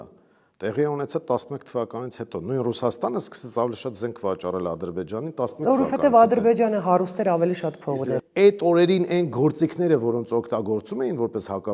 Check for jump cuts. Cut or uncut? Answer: cut